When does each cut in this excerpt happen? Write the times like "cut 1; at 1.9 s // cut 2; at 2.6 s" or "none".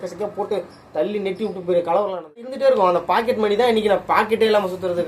cut 1; at 2.5 s